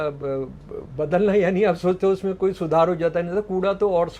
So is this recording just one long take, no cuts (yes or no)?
yes